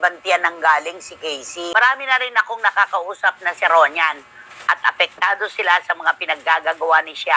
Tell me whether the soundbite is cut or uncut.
cut